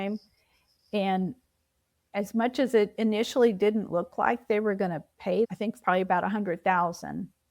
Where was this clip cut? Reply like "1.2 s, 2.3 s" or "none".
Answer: 5.5 s